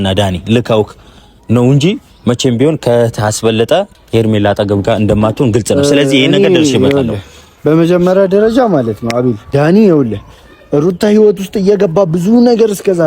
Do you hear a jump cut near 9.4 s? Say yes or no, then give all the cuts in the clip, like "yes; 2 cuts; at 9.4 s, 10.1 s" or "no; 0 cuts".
yes; 2 cuts; at 3.9 s, 9.4 s